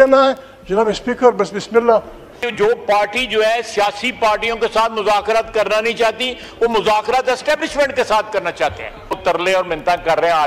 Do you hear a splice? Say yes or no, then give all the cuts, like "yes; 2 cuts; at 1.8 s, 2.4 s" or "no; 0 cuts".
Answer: yes; 2 cuts; at 2.3 s, 9.2 s